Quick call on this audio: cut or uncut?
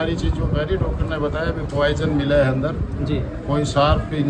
uncut